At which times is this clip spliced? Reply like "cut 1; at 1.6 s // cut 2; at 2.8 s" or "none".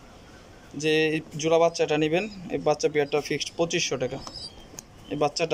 none